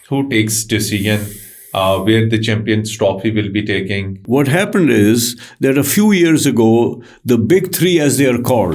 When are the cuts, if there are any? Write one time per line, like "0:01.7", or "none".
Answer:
0:04.2